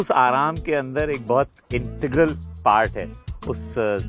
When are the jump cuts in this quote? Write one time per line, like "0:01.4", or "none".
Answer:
none